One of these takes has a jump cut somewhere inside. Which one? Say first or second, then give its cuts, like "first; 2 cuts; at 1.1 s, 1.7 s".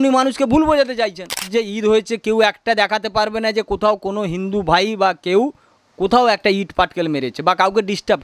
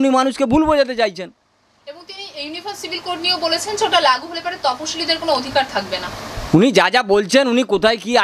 first; 1 cut; at 1.5 s